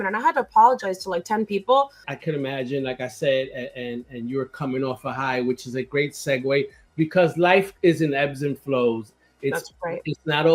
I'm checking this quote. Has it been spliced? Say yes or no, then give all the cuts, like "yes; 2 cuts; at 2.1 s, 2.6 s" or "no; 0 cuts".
yes; 1 cut; at 2.1 s